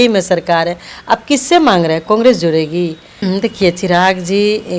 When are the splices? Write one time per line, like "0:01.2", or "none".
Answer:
0:03.2